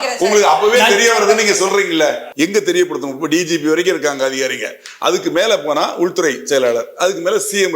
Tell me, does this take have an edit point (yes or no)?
yes